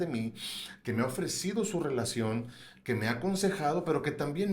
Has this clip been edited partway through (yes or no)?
no